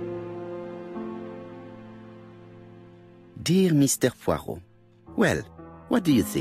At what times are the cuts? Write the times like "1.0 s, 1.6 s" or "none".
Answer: 3.0 s